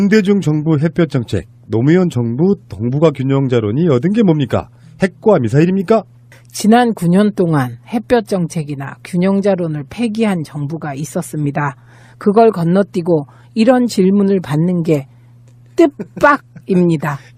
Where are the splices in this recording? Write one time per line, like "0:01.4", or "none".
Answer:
0:14.3